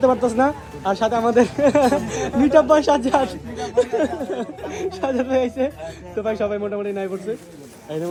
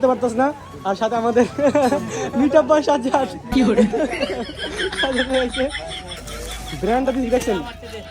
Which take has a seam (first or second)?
second